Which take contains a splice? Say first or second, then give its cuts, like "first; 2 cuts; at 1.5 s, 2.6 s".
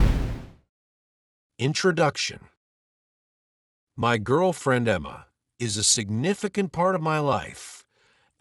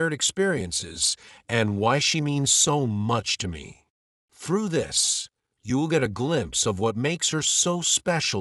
first; 1 cut; at 1.0 s